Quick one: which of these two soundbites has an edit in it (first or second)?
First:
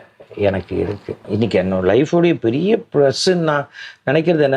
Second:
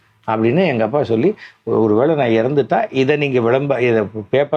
first